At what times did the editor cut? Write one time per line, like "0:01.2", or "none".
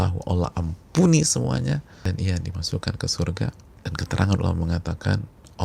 0:01.9
0:03.7